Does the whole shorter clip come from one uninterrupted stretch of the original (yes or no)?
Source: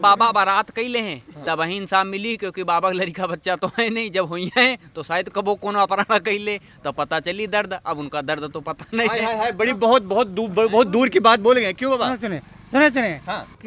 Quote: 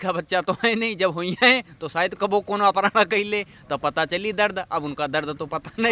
yes